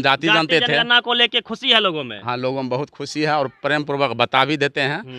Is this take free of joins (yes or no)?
yes